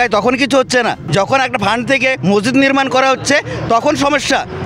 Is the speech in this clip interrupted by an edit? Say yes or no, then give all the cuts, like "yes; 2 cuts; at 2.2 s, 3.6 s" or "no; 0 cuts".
yes; 1 cut; at 1.0 s